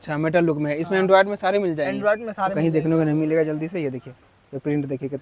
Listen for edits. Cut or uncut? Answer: cut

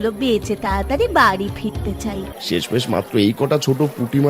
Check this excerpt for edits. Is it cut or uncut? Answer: cut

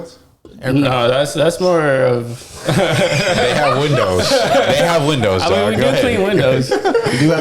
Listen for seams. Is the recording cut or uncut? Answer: uncut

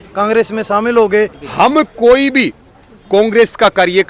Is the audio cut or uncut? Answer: cut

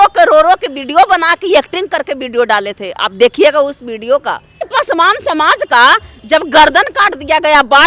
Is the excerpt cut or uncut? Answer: cut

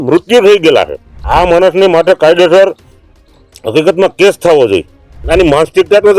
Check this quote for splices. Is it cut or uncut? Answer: cut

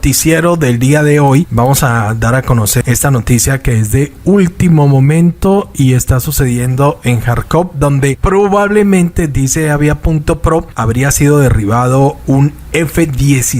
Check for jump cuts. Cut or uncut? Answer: cut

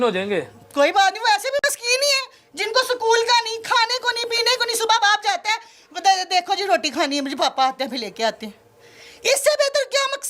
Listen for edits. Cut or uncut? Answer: uncut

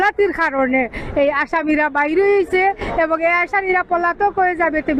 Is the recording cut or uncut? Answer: uncut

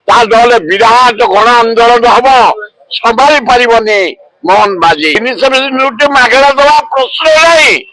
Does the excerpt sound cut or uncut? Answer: cut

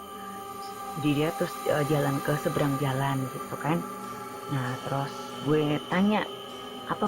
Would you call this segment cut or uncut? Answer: cut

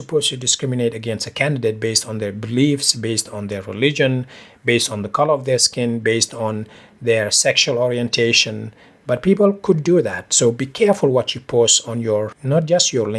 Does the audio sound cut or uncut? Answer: uncut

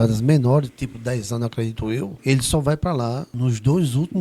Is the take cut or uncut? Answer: cut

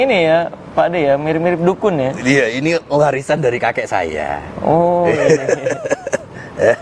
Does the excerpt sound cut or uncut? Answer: uncut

